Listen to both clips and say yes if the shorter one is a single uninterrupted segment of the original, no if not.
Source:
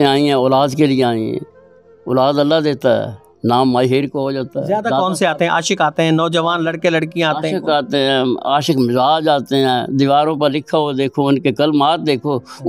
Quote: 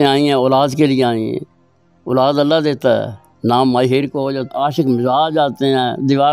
no